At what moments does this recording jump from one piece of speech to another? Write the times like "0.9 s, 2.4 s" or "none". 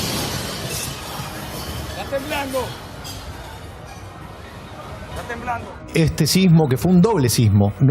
5.9 s

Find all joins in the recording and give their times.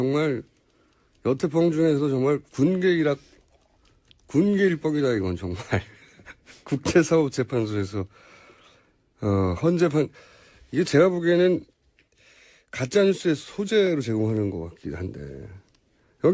7.6 s

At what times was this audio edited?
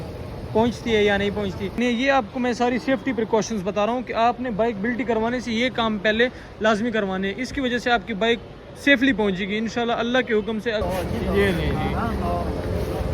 1.8 s, 10.8 s

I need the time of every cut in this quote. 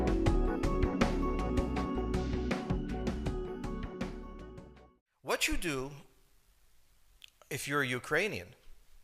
1.1 s

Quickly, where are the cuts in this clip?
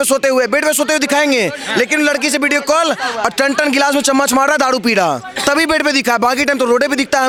none

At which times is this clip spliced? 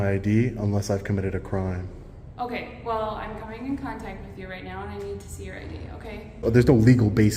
6.4 s

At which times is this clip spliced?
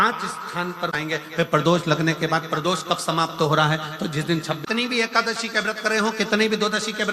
1.0 s, 4.6 s

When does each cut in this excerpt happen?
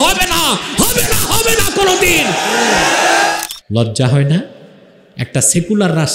3.4 s

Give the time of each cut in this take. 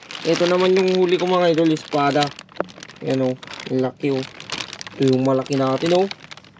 none

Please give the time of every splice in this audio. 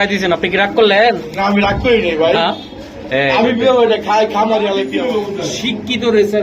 4.9 s

